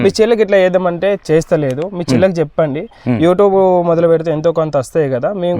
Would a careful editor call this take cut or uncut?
uncut